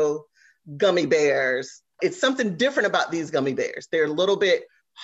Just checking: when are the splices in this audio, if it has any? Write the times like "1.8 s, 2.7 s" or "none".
2.0 s